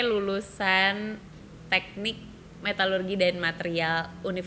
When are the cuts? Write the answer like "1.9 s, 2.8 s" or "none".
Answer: none